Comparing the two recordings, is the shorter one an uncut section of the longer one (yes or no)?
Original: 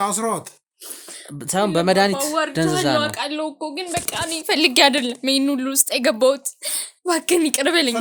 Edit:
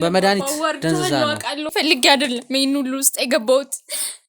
no